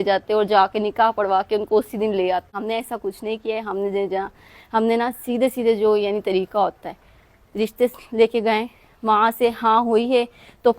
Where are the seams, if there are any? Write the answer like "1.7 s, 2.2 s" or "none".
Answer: 2.6 s